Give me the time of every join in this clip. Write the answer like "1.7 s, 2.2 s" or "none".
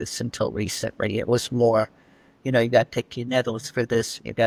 none